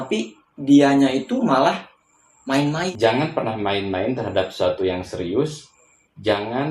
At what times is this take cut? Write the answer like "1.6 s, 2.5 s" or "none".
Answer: 2.9 s